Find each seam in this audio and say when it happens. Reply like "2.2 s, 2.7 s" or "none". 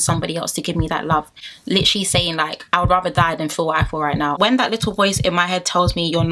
1.4 s, 4.4 s